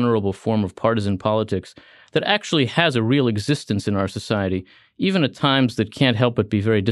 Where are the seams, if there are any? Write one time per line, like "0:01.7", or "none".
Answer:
none